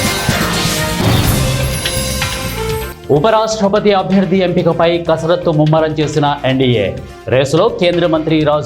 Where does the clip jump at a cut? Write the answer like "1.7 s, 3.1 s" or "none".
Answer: 2.9 s